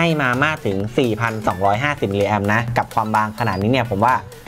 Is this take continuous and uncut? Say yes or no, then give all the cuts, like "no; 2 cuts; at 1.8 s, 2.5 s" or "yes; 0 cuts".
yes; 0 cuts